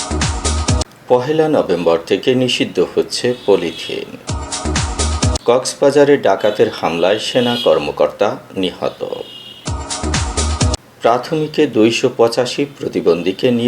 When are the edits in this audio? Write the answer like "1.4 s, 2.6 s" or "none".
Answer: 0.9 s